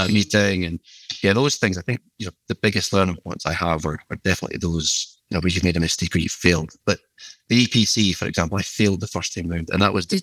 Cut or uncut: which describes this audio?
uncut